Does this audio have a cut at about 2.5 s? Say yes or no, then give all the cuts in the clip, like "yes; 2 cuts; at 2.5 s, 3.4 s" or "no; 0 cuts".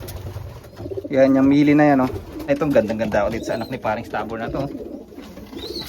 yes; 1 cut; at 2.5 s